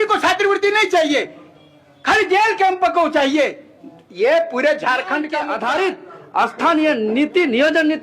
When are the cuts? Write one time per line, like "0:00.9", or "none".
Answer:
0:05.4